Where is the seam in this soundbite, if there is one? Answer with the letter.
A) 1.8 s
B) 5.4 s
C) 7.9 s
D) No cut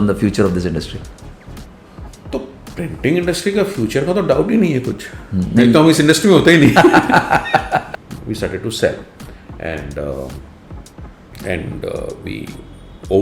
C